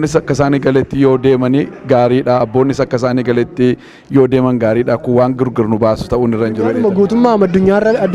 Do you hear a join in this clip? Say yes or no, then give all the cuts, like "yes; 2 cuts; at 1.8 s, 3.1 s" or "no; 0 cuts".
yes; 1 cut; at 6.7 s